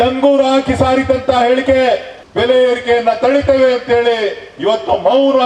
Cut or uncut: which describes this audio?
cut